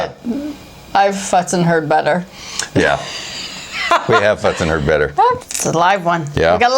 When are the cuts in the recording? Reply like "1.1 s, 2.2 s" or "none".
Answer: 5.4 s